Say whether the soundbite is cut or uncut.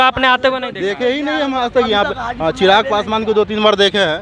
uncut